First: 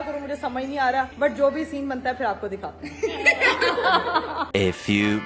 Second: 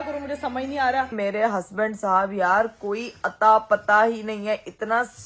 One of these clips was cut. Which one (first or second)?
second